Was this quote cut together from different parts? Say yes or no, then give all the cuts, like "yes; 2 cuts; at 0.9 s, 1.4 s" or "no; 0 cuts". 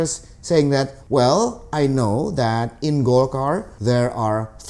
yes; 2 cuts; at 1.0 s, 3.7 s